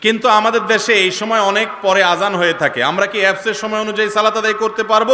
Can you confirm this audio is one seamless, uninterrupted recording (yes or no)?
yes